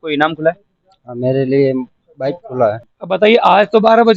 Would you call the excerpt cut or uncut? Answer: cut